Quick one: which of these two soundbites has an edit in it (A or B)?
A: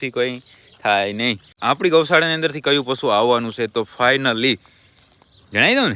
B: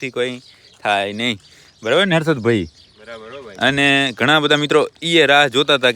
A